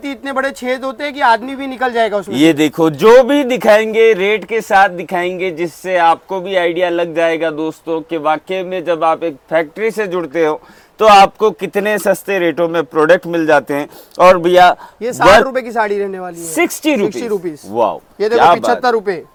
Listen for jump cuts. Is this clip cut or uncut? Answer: uncut